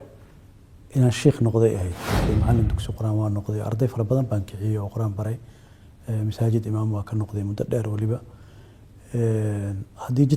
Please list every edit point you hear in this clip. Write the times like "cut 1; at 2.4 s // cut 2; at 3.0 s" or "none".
cut 1; at 2.3 s